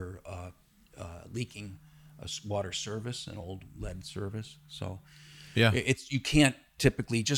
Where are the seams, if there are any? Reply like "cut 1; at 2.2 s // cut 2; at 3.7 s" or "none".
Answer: none